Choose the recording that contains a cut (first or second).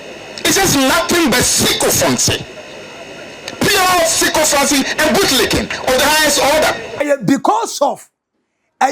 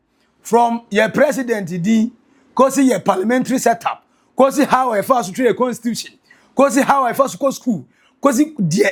first